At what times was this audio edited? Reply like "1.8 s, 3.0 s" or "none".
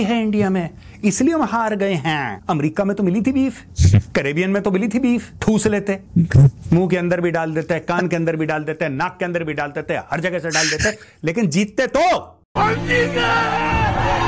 none